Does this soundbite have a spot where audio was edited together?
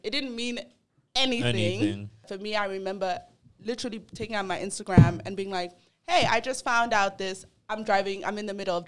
yes; 1 cut; at 2.3 s

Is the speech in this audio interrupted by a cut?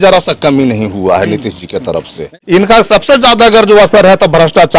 yes; 1 cut; at 2.3 s

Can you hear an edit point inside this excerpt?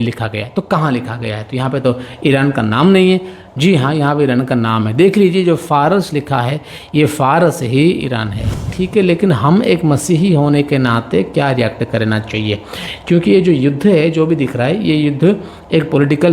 yes; 1 cut; at 8.7 s

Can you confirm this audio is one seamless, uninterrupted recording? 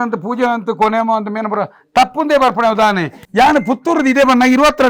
no; 1 cut; at 3.1 s

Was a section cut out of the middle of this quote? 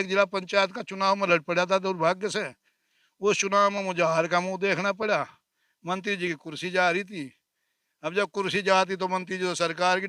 no; 0 cuts

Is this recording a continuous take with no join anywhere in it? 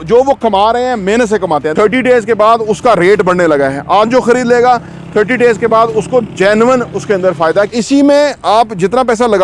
no; 2 cuts; at 1.7 s, 7.7 s

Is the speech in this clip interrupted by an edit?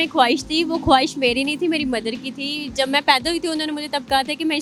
no; 0 cuts

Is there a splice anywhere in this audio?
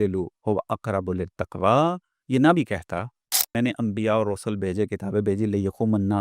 yes; 1 cut; at 3.6 s

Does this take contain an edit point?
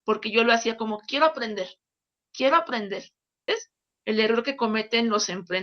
yes; 1 cut; at 3.5 s

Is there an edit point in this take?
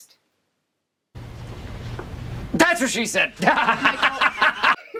no; 0 cuts

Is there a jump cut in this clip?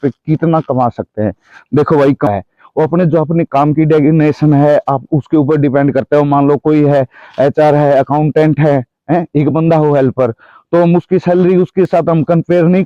yes; 1 cut; at 2.3 s

